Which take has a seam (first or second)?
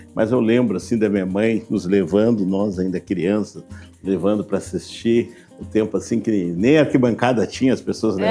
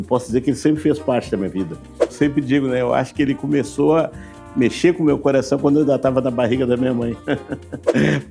second